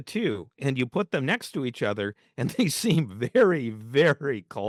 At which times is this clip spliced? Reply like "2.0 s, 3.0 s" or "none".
none